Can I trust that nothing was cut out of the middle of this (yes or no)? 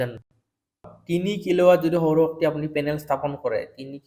no